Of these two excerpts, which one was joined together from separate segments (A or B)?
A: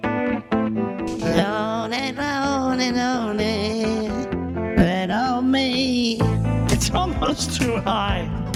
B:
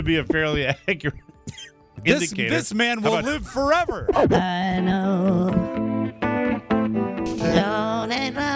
B